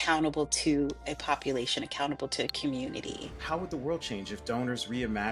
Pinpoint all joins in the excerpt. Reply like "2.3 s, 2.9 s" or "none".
3.3 s